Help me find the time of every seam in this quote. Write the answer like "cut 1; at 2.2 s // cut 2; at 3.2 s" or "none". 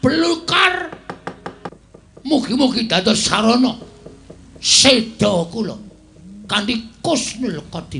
cut 1; at 1.7 s